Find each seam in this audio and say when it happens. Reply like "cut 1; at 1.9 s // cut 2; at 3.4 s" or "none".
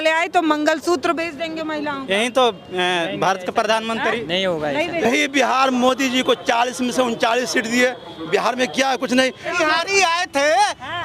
cut 1; at 5.1 s // cut 2; at 9.5 s

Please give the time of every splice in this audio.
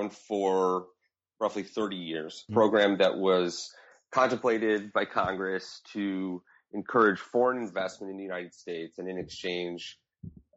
cut 1; at 2.4 s

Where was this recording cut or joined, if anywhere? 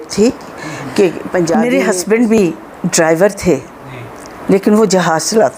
cut 1; at 1.6 s

